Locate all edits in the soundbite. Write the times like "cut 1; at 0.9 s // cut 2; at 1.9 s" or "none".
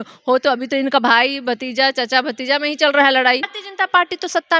cut 1; at 3.6 s